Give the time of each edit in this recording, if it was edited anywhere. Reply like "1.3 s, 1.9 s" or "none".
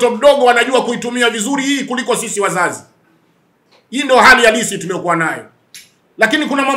none